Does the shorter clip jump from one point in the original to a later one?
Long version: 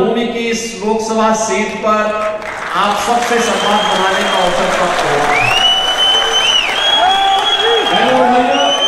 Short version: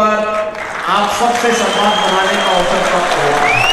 no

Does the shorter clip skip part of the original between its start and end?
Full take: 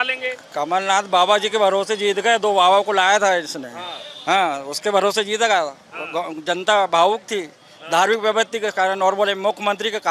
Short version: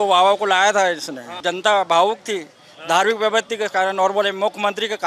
yes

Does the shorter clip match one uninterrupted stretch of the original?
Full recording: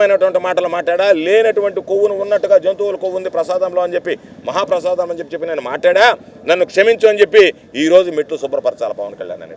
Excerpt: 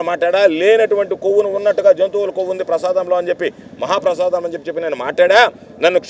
yes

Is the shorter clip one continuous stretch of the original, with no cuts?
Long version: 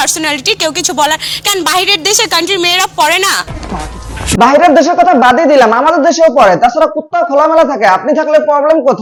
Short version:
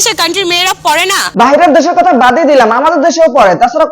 no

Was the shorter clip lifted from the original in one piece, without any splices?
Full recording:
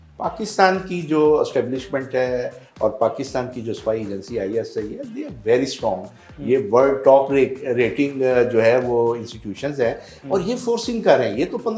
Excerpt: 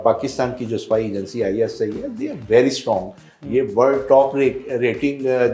yes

